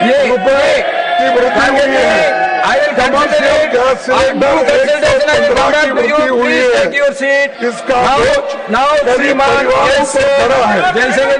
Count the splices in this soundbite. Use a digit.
0